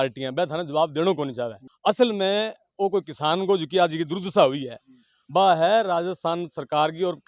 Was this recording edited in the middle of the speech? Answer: no; 0 cuts

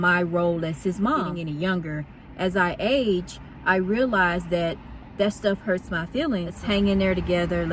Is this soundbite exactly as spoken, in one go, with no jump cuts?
no; 2 cuts; at 1.4 s, 6.5 s

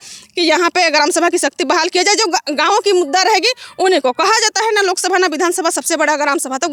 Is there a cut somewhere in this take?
no; 0 cuts

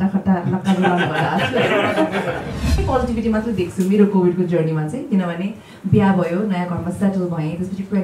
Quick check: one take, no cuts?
no; 1 cut; at 2.8 s

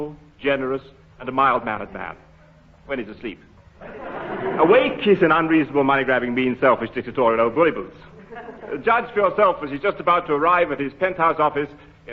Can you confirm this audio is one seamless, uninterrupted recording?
no; 1 cut; at 7.1 s

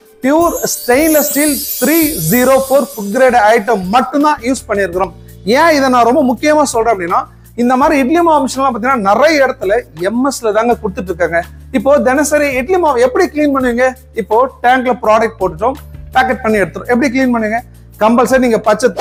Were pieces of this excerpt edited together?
no; 0 cuts

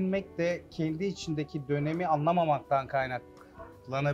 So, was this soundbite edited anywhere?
no; 0 cuts

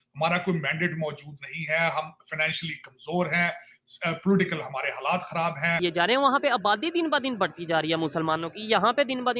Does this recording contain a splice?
yes; 1 cut; at 5.8 s

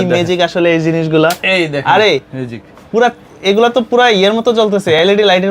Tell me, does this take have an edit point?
no; 0 cuts

